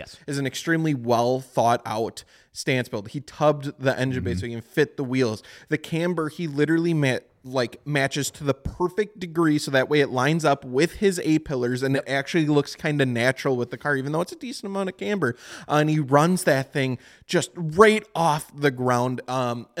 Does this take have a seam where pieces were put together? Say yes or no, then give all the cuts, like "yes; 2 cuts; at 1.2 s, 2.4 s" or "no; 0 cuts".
no; 0 cuts